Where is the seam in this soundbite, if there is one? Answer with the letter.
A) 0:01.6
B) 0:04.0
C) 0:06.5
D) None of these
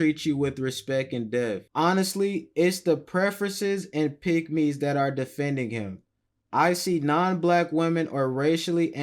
A